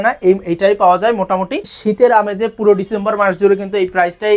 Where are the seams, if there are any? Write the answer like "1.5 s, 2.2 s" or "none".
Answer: 1.7 s